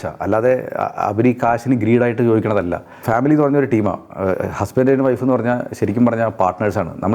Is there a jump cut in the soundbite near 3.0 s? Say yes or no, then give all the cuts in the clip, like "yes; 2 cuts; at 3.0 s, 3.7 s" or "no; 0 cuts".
yes; 1 cut; at 3.0 s